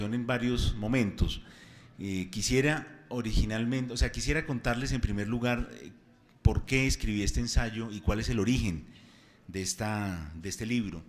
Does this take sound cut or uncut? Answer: cut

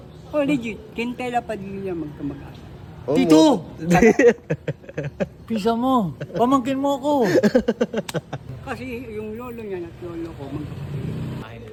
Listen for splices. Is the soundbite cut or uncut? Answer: uncut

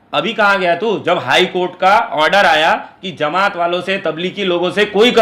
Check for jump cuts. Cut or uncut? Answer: uncut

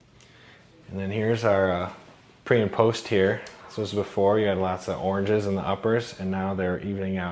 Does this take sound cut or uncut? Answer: uncut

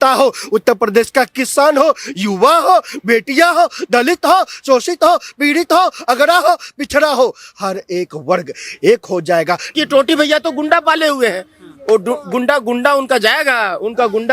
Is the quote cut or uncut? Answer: cut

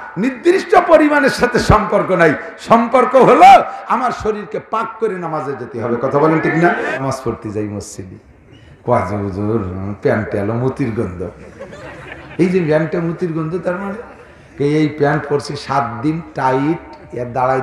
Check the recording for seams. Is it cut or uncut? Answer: cut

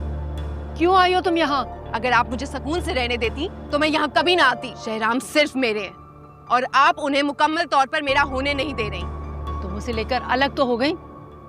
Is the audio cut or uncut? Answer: cut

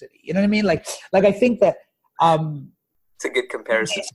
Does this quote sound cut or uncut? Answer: uncut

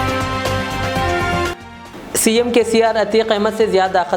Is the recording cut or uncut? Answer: cut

